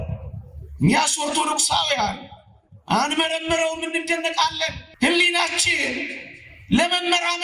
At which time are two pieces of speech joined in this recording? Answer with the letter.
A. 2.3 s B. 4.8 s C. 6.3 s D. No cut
B